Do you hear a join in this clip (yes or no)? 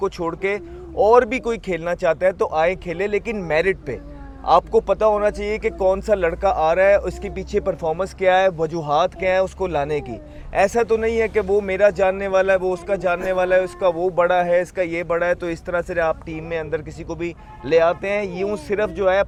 no